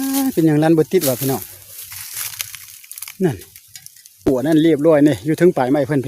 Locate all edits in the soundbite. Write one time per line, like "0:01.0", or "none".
0:04.3